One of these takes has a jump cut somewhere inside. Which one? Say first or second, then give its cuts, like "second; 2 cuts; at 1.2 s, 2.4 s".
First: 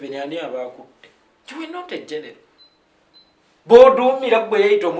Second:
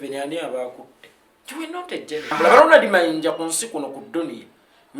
second; 1 cut; at 2.4 s